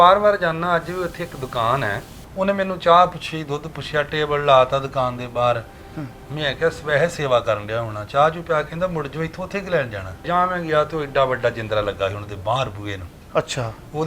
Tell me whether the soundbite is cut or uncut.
cut